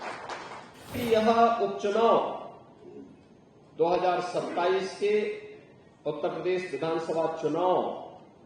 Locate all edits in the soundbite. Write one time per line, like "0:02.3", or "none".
0:01.0

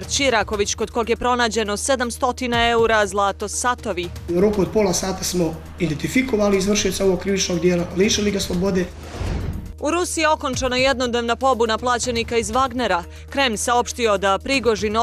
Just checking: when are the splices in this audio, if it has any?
0:04.3
0:09.0

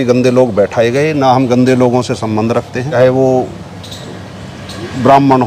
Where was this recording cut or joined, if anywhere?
0:02.9

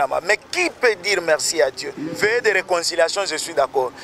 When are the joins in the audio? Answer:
0:02.1

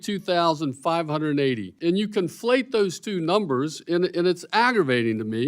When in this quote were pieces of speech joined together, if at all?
0:01.7

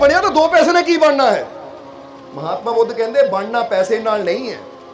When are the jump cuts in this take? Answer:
none

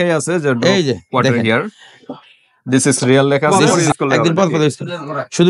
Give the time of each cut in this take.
0:03.8

